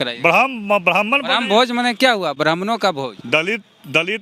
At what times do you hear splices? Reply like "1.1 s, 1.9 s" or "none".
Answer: none